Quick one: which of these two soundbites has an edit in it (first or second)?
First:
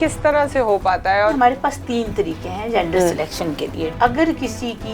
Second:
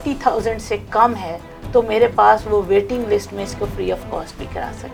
first